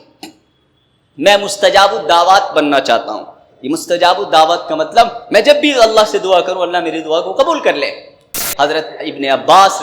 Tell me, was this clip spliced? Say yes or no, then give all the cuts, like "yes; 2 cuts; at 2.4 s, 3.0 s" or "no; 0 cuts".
yes; 1 cut; at 8.5 s